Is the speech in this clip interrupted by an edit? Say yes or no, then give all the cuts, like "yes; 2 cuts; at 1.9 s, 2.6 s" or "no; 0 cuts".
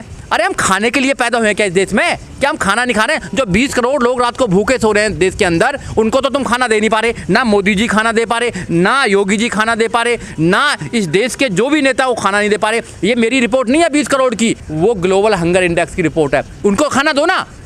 no; 0 cuts